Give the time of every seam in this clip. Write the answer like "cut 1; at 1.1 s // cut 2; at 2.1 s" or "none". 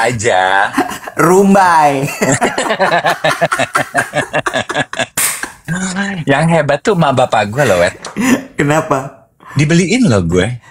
none